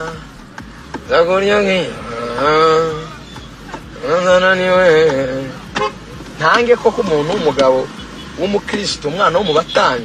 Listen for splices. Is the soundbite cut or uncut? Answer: uncut